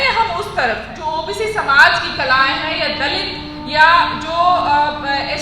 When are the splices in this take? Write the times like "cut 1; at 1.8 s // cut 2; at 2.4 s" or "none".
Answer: cut 1; at 0.9 s

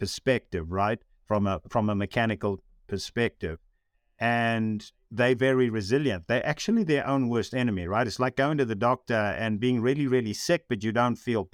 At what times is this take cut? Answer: none

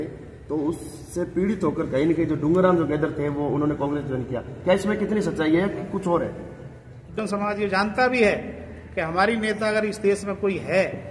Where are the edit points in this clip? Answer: cut 1; at 7.2 s

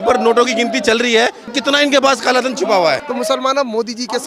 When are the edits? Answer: cut 1; at 1.5 s // cut 2; at 3.0 s

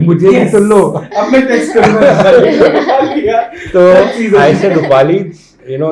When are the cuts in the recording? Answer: none

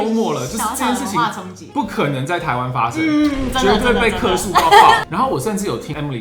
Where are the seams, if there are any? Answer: none

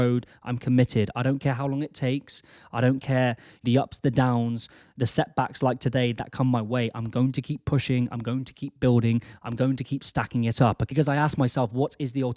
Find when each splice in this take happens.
cut 1; at 3.6 s

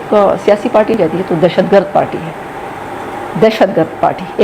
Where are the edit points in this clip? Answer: cut 1; at 0.9 s

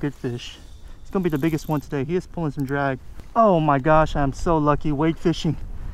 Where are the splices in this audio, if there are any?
cut 1; at 3.2 s

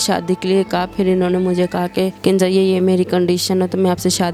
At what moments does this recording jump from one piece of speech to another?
none

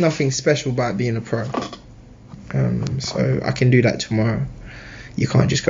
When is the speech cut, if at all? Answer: none

